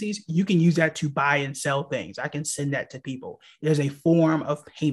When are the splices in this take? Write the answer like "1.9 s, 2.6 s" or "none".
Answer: none